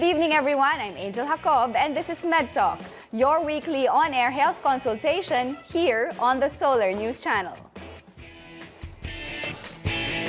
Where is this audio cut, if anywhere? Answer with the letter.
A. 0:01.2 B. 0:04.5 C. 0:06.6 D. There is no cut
D